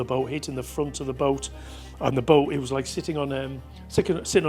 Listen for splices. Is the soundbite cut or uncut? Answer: uncut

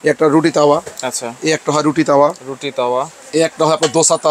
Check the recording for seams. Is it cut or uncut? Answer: uncut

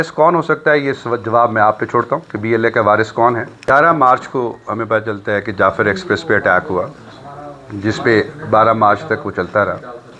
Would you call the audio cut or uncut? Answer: cut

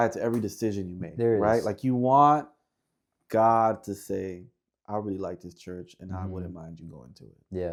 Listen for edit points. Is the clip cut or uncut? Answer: uncut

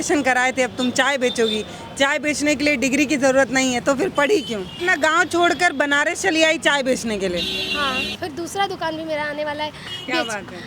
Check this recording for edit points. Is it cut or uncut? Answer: cut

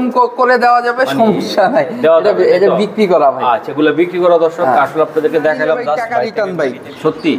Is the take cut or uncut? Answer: cut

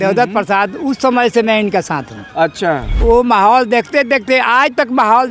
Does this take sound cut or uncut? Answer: cut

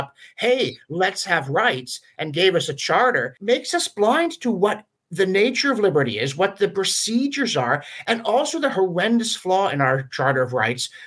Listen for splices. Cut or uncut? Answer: cut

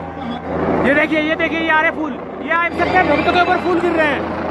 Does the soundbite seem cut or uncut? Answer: uncut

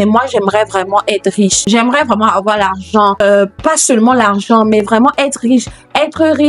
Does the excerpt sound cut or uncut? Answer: cut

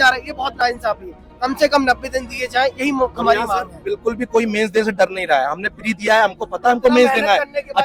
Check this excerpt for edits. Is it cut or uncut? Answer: uncut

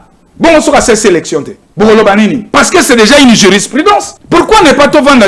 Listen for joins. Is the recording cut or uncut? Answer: cut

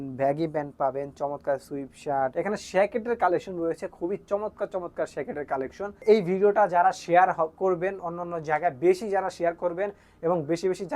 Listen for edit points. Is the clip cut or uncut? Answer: cut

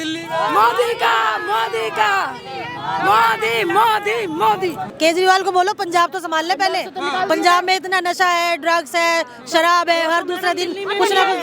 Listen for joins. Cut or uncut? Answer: cut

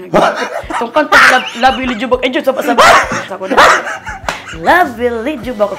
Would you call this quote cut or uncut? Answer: cut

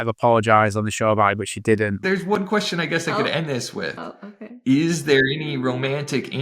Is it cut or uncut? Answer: cut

